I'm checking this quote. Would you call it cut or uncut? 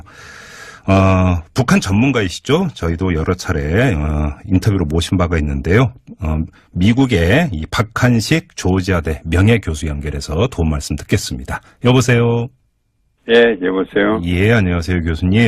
uncut